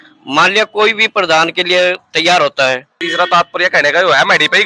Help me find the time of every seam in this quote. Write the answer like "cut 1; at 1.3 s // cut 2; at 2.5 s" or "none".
cut 1; at 3.0 s